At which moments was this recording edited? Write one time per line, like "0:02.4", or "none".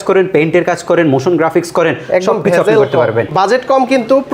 0:03.3